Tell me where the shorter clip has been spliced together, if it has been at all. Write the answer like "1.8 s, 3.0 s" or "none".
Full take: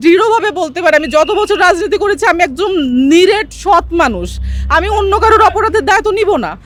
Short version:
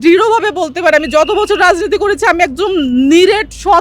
none